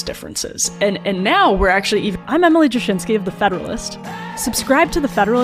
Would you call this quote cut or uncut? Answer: uncut